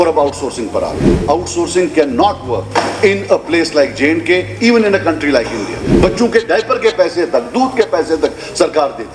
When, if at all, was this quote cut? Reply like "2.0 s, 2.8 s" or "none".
1.1 s, 2.6 s, 5.8 s